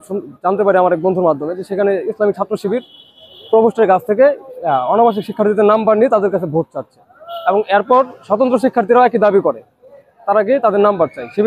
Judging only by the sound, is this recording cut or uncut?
uncut